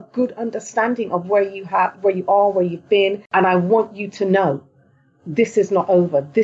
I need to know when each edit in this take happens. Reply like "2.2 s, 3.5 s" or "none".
3.2 s